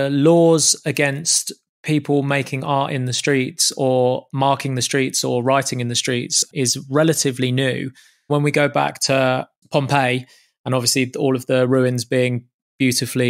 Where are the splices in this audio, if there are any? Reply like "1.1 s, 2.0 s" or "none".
6.4 s, 8.3 s, 9.6 s